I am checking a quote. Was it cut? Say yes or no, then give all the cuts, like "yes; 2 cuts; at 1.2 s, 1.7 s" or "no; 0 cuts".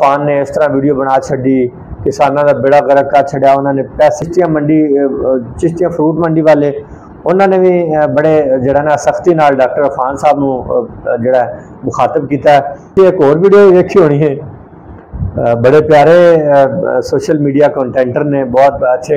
yes; 2 cuts; at 4.2 s, 12.9 s